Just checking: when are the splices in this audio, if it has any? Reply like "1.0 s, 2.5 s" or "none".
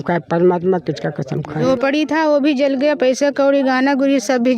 1.6 s